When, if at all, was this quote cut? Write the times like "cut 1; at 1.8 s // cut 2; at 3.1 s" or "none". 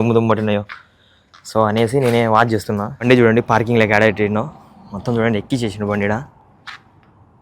cut 1; at 2.9 s